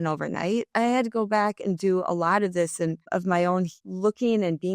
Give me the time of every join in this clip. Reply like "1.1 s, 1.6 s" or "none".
3.1 s, 3.8 s

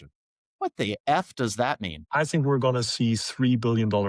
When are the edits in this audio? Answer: 1.9 s

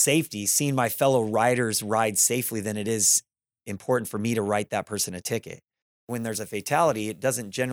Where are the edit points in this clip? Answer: 6.1 s

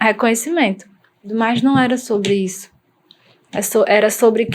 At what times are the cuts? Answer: 1.3 s

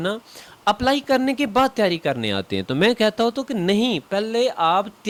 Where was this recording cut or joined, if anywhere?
none

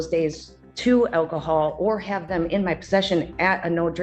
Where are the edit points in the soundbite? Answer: none

